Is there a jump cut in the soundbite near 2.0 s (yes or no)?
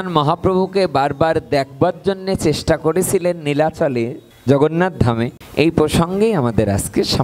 no